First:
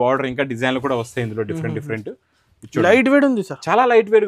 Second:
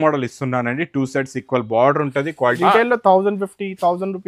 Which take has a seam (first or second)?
second